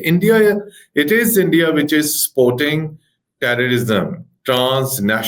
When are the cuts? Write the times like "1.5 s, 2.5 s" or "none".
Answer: none